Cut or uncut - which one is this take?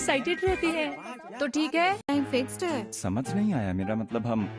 uncut